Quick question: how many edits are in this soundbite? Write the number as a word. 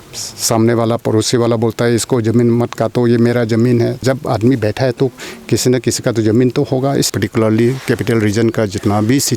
two